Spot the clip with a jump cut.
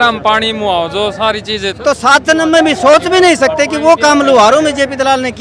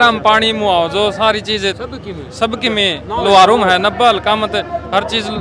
first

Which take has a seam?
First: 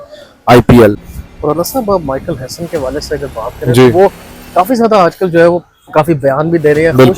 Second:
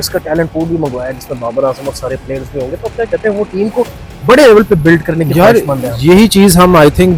first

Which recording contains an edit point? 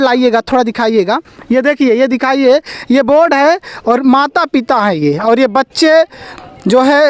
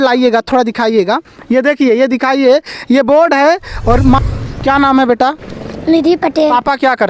second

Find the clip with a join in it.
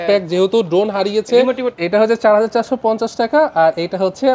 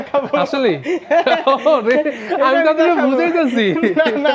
first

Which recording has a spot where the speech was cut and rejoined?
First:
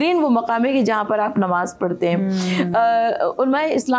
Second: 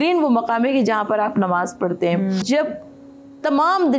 second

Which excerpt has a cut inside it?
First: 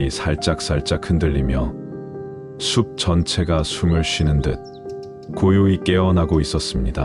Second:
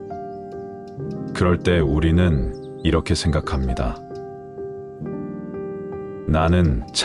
second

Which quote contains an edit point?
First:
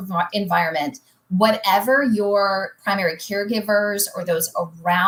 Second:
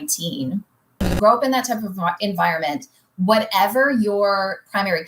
second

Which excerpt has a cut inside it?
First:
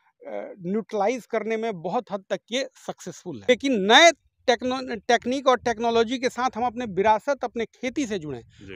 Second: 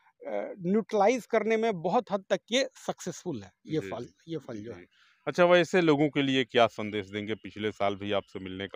first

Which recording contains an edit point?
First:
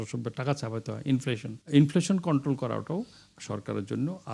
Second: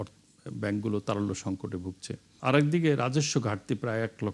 second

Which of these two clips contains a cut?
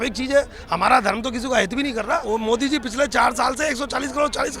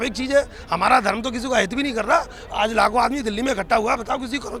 first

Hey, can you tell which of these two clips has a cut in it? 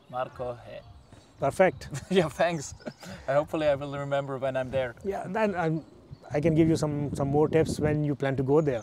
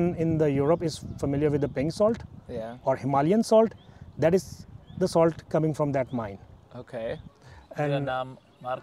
second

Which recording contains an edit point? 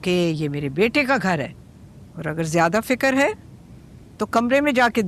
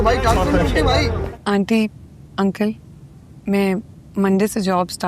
second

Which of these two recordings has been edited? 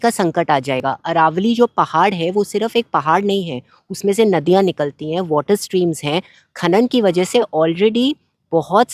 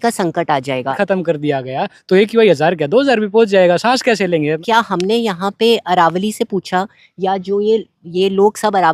second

